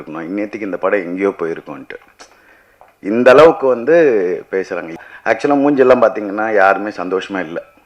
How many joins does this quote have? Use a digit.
1